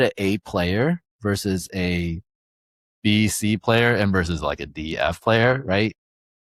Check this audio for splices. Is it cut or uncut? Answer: uncut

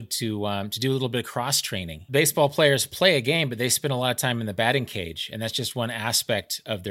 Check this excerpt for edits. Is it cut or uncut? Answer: cut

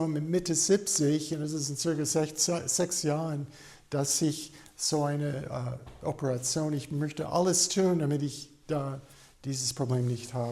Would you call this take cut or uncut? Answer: uncut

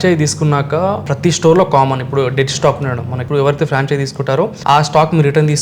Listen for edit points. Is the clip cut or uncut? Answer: cut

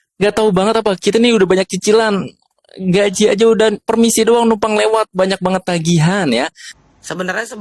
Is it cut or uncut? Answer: cut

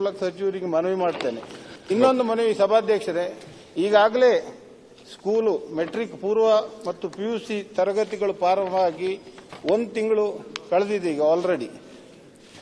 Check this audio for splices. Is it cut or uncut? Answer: uncut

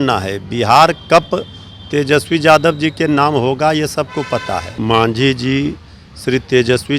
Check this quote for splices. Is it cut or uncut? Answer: cut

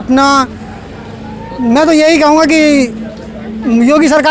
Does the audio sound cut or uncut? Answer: uncut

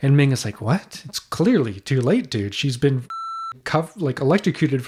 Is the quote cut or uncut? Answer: uncut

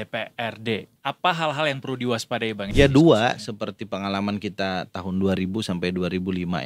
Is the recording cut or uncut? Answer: cut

